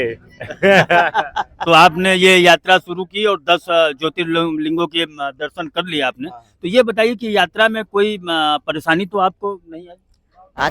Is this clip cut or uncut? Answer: cut